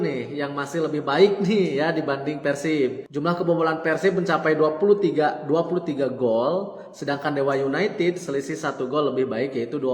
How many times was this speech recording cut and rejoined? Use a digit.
1